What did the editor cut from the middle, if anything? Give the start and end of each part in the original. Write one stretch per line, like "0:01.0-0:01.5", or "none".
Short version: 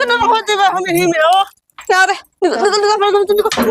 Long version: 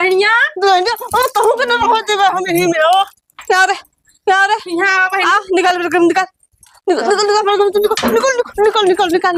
0:03.9-0:06.7